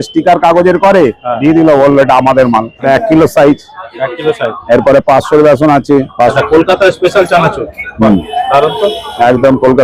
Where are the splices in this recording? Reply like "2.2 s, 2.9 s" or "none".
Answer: 2.8 s, 6.3 s